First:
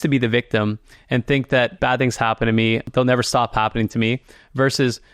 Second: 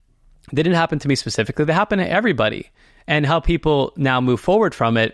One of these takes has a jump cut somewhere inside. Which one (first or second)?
first